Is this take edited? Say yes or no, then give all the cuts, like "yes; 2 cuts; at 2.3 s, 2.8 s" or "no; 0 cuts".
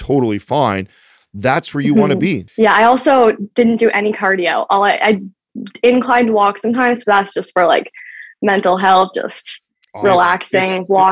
yes; 1 cut; at 2.5 s